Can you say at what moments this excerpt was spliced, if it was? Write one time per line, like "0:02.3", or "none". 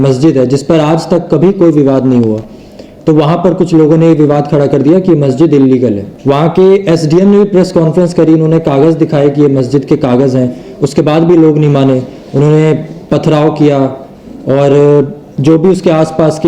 0:06.1